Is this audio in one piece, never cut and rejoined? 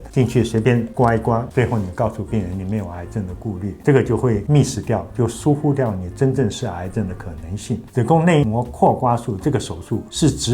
no; 3 cuts; at 1.5 s, 4.4 s, 7.8 s

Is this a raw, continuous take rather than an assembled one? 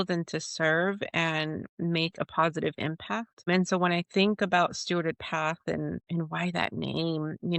no; 2 cuts; at 3.5 s, 6.0 s

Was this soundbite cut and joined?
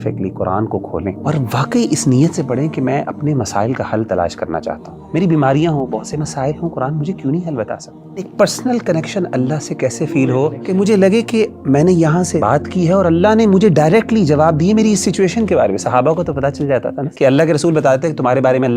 yes; 6 cuts; at 1.2 s, 4.9 s, 8.3 s, 10.6 s, 12.4 s, 17.0 s

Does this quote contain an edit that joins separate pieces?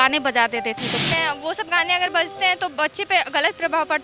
yes; 1 cut; at 1.0 s

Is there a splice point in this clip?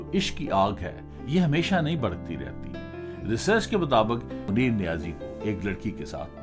yes; 1 cut; at 4.5 s

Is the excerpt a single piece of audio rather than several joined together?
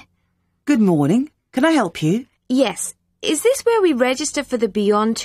no; 1 cut; at 2.3 s

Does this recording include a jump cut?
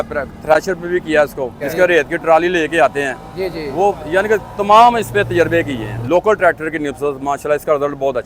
yes; 2 cuts; at 1.6 s, 5.9 s

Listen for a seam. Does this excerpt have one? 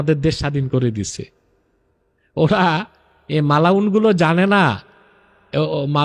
no; 0 cuts

